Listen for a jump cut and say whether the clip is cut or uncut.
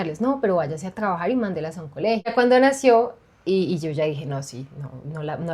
cut